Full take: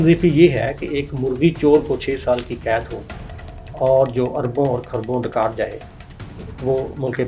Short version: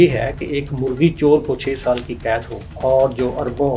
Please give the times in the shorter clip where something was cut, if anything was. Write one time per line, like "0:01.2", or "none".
0:02.6